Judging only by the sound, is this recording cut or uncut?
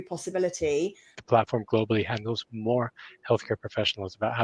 cut